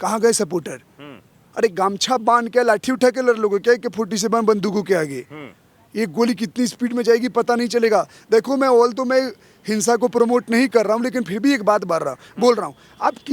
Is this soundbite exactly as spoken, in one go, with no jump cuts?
yes; 0 cuts

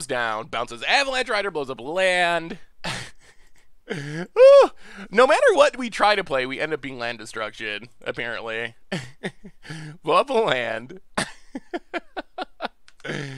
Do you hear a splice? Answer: yes; 1 cut; at 2.7 s

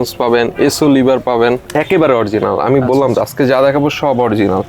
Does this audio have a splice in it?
yes; 1 cut; at 1.7 s

